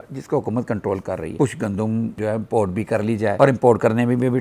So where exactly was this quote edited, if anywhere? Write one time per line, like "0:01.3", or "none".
0:01.3